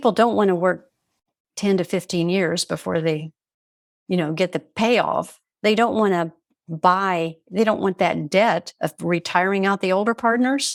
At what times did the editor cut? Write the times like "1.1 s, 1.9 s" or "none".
none

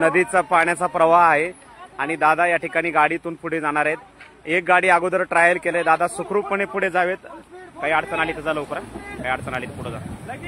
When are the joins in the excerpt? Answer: none

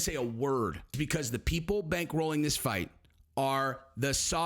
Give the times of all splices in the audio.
0.9 s

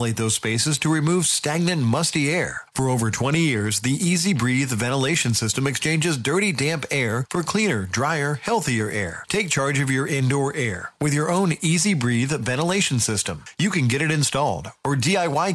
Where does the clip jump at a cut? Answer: none

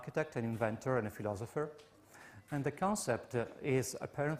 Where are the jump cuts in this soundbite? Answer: 3.1 s

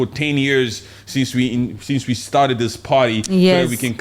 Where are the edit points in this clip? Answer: none

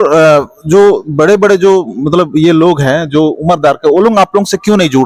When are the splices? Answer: none

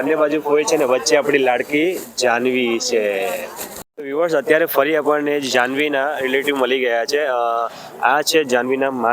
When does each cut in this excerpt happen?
3.7 s

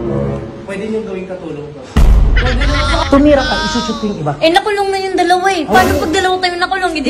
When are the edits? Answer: 1.8 s, 3.0 s

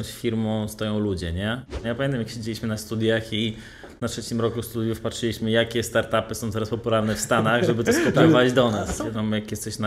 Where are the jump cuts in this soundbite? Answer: 1.8 s, 8.9 s

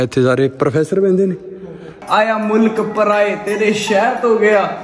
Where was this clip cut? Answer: 2.0 s

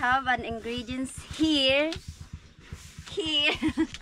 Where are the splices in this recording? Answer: none

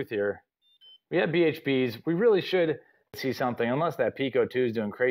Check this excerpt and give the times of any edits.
3.2 s

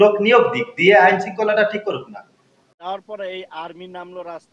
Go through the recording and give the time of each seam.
2.8 s

